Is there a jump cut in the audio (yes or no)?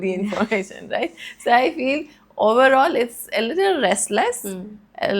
no